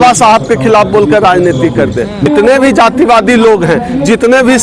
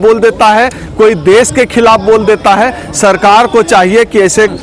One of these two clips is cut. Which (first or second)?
first